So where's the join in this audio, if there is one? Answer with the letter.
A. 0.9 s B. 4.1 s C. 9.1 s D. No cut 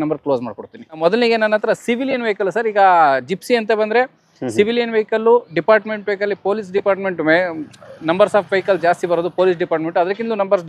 A